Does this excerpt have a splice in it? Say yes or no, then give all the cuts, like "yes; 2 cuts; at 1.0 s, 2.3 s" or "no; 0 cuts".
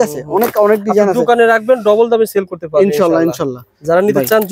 no; 0 cuts